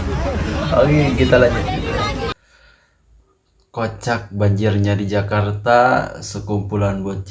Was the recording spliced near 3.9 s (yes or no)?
no